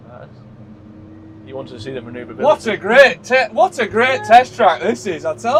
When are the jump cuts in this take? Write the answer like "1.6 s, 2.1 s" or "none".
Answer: none